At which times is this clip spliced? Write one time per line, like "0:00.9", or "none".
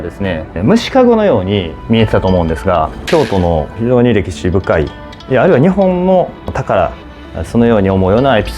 0:01.7
0:03.0
0:06.5